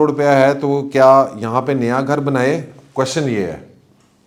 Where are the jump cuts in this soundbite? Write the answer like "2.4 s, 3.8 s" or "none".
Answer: none